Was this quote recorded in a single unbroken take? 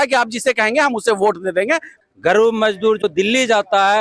no; 1 cut; at 1.9 s

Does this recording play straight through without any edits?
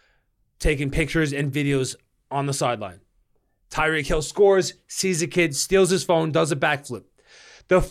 yes; 0 cuts

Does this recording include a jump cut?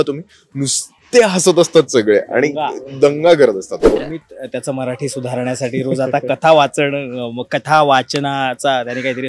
yes; 1 cut; at 4.0 s

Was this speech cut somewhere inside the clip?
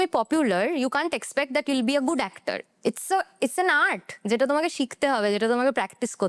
no; 0 cuts

